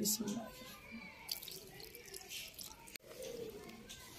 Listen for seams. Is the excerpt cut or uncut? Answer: uncut